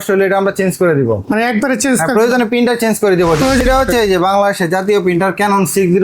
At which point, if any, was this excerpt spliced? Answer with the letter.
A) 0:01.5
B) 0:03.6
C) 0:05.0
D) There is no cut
B